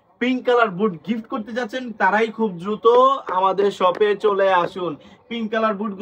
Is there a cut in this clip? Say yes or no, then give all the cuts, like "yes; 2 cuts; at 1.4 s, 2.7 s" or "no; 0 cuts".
no; 0 cuts